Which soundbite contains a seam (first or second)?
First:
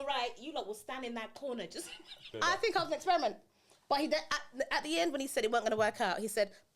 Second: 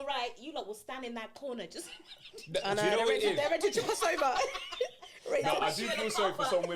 first